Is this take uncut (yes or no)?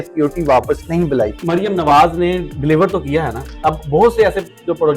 no